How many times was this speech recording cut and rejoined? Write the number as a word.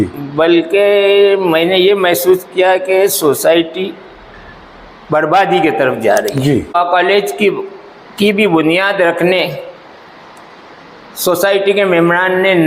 one